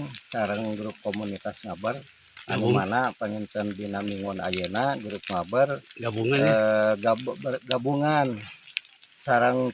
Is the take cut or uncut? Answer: uncut